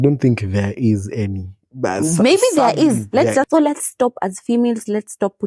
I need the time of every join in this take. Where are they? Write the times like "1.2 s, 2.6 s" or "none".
3.5 s